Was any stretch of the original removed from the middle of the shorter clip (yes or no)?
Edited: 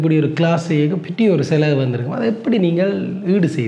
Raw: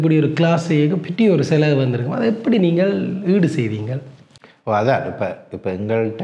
no